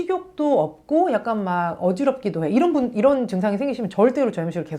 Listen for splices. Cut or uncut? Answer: uncut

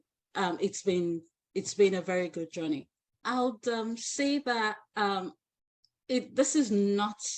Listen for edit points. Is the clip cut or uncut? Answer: cut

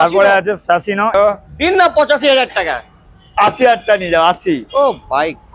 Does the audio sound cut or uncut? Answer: cut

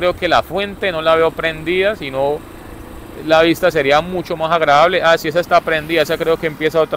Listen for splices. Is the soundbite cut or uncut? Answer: uncut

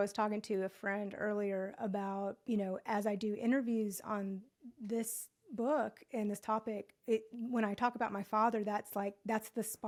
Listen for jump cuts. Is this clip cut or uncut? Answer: uncut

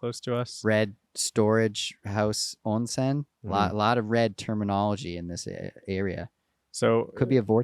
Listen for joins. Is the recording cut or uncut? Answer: uncut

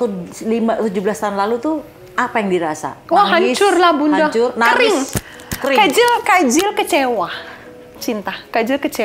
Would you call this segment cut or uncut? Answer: uncut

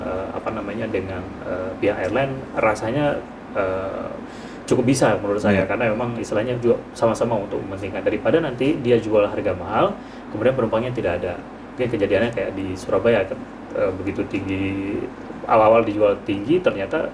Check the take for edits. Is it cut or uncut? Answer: uncut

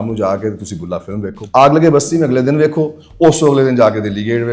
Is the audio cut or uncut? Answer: cut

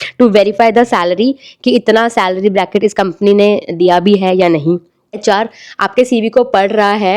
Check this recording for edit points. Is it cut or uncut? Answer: cut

